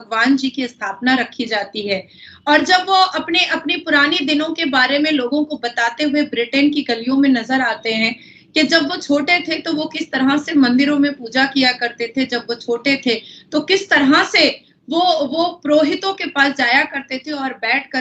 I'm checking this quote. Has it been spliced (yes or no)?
no